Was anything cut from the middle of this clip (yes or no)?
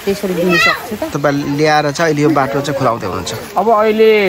yes